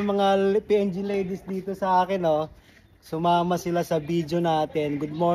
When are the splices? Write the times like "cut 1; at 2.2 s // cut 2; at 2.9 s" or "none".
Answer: none